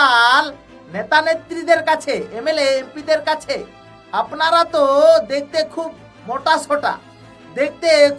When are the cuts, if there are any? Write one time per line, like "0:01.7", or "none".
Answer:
none